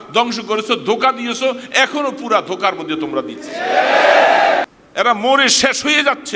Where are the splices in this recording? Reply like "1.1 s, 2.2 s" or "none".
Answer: 4.8 s